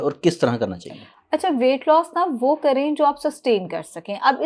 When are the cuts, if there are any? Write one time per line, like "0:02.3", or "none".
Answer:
none

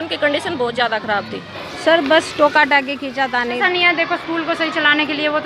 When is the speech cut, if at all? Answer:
0:01.6
0:03.6

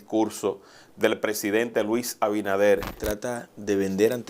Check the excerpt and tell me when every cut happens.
0:03.1

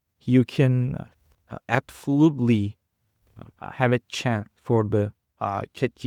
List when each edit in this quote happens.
none

